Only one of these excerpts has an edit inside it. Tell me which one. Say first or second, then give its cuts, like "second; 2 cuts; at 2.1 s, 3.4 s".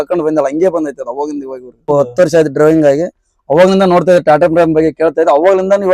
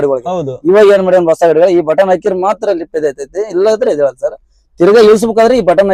first; 1 cut; at 1.9 s